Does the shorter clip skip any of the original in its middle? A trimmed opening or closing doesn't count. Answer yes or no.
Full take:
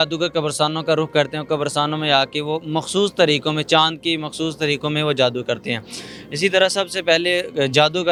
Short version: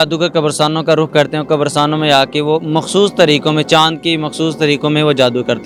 no